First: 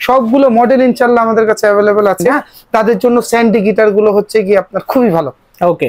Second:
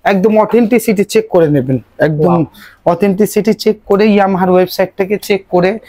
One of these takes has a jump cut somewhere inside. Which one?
first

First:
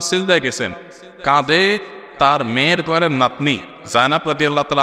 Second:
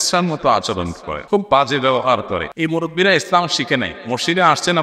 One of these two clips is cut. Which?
second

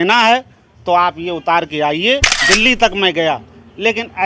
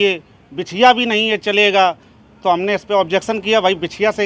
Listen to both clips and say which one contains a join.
first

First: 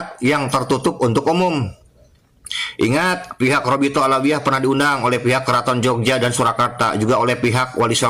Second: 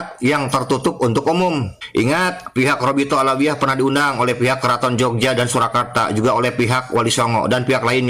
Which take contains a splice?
second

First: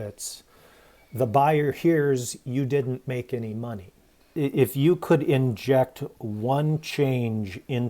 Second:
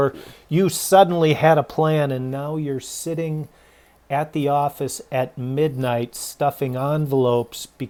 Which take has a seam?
first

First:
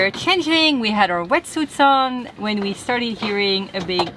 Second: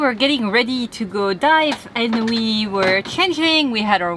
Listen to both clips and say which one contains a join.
first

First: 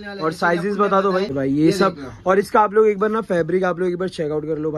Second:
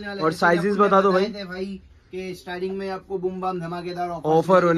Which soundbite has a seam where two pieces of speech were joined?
first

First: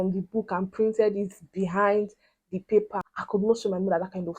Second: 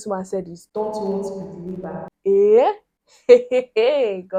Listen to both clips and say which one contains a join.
first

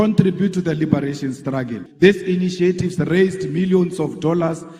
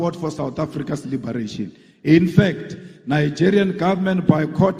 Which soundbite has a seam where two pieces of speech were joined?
first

